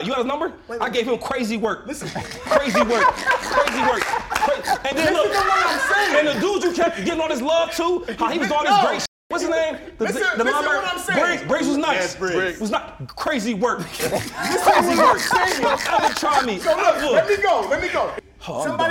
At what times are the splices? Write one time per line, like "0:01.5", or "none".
none